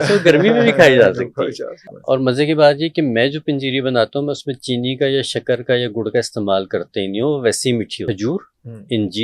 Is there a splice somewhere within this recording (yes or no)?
yes